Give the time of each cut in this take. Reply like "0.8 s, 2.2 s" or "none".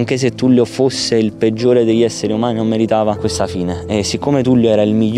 3.2 s

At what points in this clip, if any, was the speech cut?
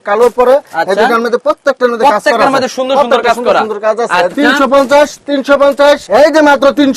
4.3 s, 6.0 s

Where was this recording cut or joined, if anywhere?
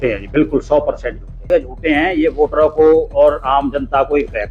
1.5 s

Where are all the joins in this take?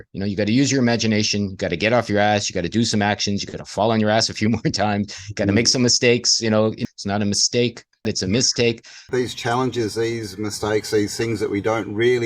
6.8 s, 8.0 s, 8.9 s

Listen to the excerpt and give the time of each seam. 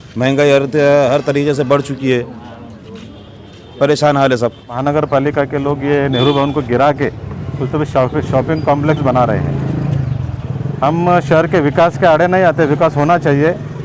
4.8 s

